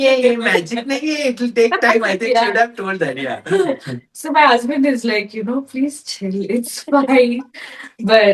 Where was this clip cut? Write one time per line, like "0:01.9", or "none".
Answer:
none